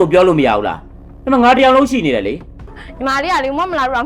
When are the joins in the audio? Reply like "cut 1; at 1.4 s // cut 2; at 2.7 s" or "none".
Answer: cut 1; at 2.8 s